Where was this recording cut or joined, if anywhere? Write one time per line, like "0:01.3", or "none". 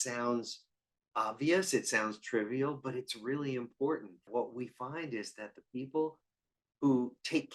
0:04.2